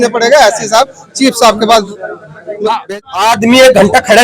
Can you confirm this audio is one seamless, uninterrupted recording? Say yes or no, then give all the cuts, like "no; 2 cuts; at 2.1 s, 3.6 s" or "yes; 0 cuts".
no; 1 cut; at 2.8 s